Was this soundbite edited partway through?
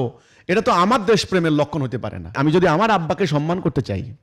yes; 1 cut; at 2.4 s

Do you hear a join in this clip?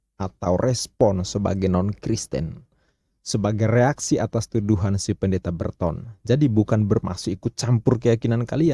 no; 0 cuts

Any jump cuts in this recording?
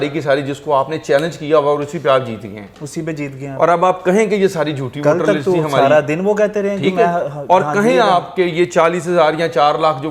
no; 0 cuts

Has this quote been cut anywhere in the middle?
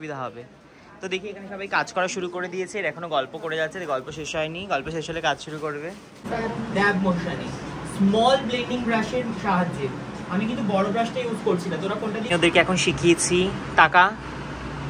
yes; 2 cuts; at 6.2 s, 12.2 s

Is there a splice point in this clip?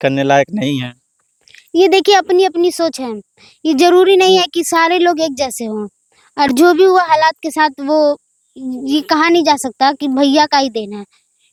no; 0 cuts

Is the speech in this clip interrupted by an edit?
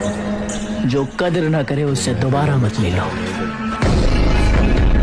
no; 0 cuts

